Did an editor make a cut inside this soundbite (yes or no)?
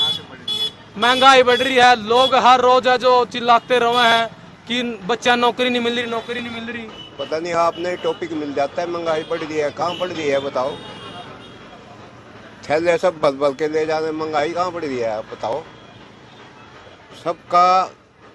no